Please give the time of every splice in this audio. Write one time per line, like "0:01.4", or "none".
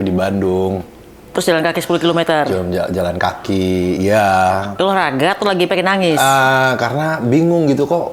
none